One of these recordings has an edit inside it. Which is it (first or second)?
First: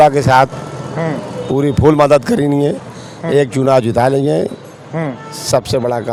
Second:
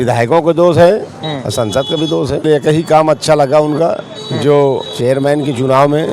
second